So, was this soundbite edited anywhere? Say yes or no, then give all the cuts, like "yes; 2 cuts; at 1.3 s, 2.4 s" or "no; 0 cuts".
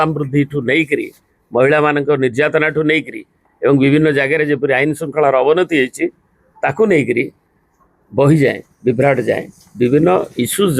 no; 0 cuts